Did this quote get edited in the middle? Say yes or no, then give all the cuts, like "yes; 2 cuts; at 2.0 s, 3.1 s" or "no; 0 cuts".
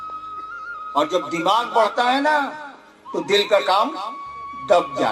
yes; 1 cut; at 0.9 s